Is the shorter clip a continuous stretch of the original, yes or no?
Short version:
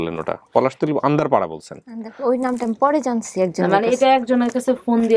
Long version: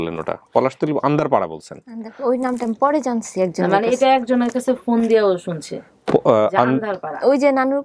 yes